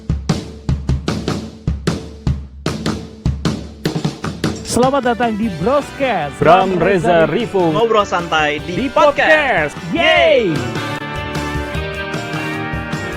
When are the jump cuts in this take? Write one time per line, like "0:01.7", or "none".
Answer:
none